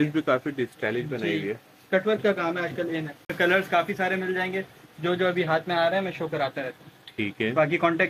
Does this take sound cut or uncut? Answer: cut